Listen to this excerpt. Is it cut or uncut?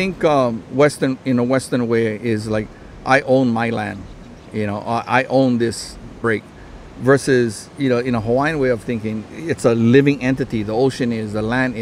cut